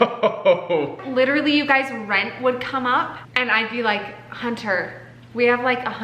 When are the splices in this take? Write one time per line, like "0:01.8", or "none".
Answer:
0:01.0